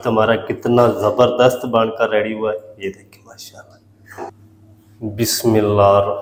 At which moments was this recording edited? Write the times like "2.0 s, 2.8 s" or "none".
none